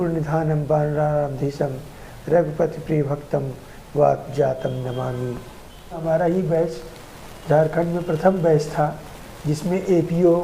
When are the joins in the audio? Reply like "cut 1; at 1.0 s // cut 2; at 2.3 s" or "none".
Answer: cut 1; at 6.0 s